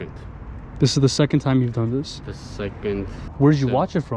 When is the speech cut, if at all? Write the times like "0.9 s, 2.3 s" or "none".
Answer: 3.2 s